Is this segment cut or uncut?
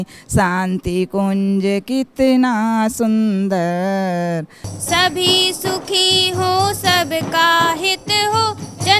cut